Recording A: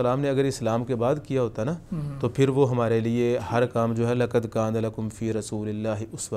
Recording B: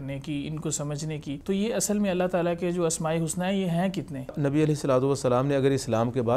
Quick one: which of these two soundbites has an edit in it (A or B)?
B